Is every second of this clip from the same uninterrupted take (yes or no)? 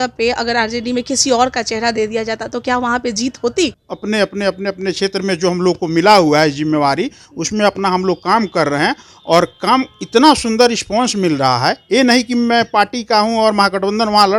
no